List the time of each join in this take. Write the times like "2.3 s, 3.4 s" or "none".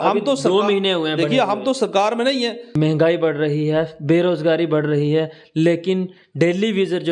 2.7 s